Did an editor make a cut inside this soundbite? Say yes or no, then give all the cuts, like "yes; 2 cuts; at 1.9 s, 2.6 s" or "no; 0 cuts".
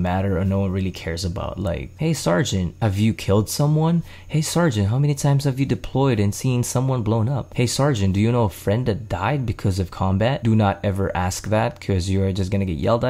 yes; 4 cuts; at 1.9 s, 2.7 s, 7.4 s, 10.4 s